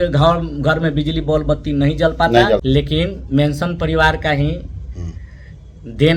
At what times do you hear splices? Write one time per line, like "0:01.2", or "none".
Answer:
0:02.6